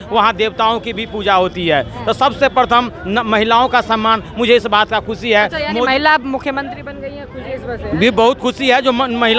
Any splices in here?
no; 0 cuts

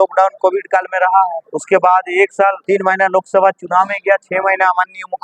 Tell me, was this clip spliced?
yes; 2 cuts; at 1.5 s, 2.6 s

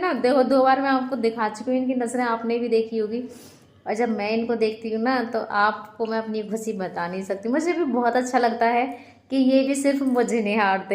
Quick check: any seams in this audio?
no; 0 cuts

